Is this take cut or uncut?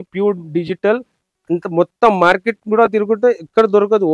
uncut